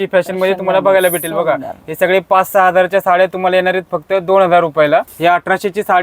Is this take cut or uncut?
cut